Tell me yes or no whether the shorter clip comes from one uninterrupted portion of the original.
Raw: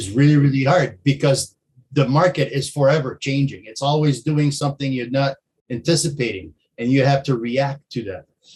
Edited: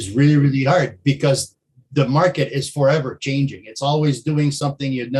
yes